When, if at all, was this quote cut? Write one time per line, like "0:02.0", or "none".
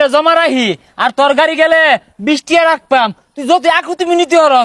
none